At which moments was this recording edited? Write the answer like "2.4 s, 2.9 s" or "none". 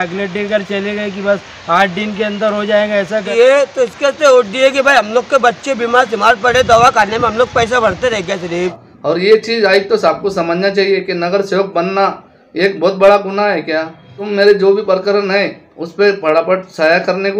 3.3 s, 8.9 s, 14.2 s